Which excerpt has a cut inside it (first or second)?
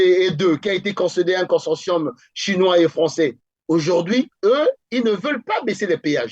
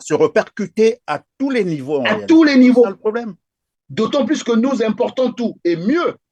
first